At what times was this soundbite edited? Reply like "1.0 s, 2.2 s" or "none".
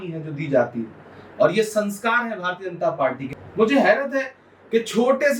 3.2 s